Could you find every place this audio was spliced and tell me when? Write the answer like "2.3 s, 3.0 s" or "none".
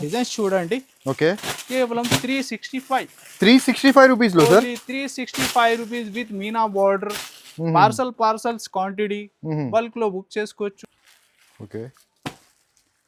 10.8 s